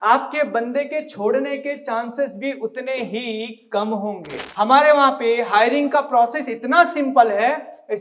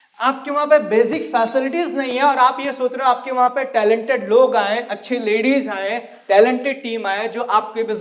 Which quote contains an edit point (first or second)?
first